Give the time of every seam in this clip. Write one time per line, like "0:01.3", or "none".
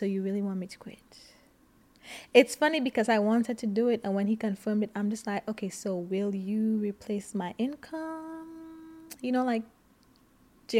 none